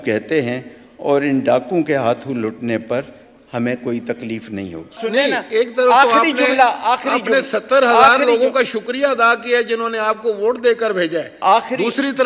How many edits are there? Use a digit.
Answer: 1